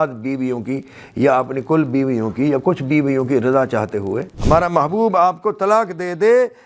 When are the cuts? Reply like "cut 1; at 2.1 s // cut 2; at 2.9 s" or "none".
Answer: cut 1; at 4.3 s